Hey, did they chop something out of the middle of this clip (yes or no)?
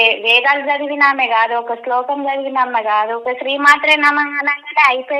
yes